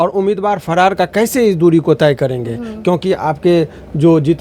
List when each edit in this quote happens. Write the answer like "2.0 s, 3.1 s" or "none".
none